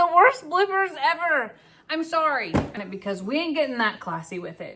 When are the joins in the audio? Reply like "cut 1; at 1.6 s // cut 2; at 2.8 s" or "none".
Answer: cut 1; at 2.8 s